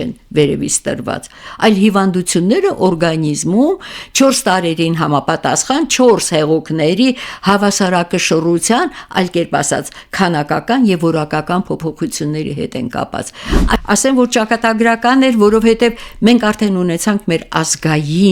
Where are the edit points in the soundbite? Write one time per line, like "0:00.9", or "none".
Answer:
0:13.7